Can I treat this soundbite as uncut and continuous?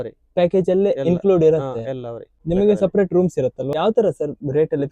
no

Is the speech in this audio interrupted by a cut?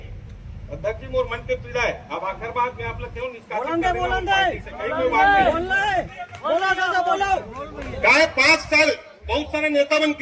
no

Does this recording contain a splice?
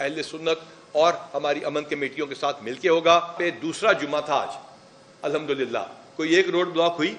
yes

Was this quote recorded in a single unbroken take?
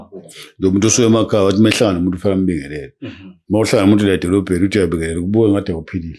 yes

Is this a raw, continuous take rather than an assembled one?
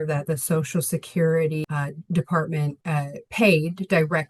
no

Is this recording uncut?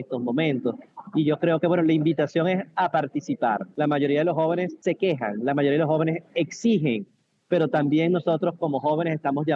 no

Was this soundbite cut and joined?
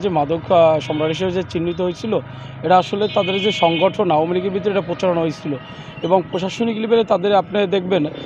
no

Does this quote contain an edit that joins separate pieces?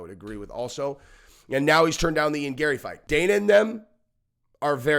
yes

